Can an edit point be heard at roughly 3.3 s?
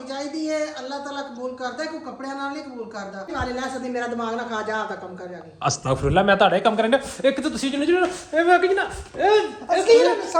yes; 1 cut; at 3.3 s

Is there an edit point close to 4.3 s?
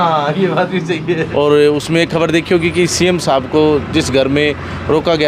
no; 1 cut; at 1.3 s

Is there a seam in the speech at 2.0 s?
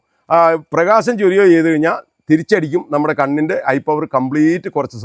no; 0 cuts

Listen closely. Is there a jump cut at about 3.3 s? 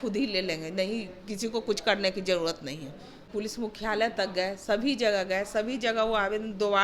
yes; 1 cut; at 3.3 s

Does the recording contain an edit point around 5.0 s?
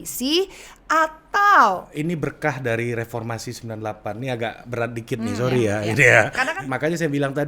no; 2 cuts; at 1.9 s, 6.5 s

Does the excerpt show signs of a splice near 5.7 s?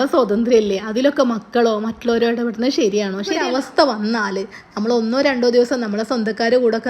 no; 1 cut; at 3.4 s

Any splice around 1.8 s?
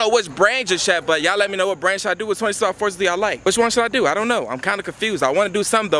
no; 0 cuts

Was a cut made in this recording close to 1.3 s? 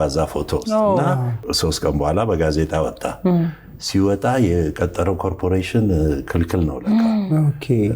yes; 1 cut; at 1.3 s

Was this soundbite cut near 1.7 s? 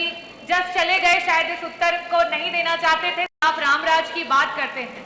no; 1 cut; at 3.3 s

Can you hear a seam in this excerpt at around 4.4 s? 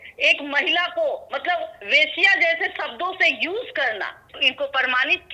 yes; 1 cut; at 4.4 s

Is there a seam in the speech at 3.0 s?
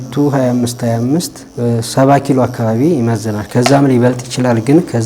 no; 1 cut; at 1.4 s

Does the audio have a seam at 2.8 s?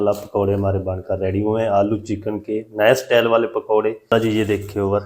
no; 1 cut; at 4.1 s

